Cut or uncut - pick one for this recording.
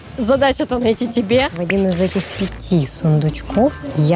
cut